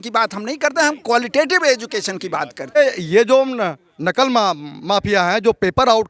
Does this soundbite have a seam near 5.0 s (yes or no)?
no